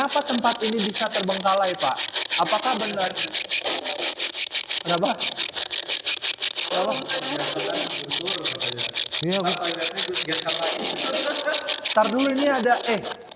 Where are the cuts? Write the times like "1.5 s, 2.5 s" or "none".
none